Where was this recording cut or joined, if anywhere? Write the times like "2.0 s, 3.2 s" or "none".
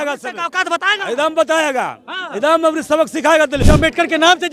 3.6 s